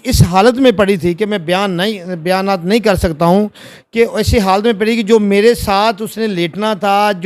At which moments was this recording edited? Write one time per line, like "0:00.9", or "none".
none